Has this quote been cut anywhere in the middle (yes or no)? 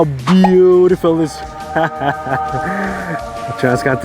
no